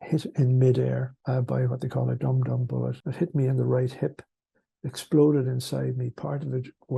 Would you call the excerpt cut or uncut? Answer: cut